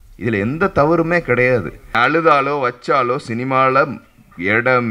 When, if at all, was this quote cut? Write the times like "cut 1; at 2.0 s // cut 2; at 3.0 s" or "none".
cut 1; at 1.8 s